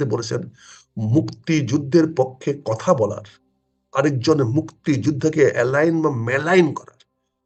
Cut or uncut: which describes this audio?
uncut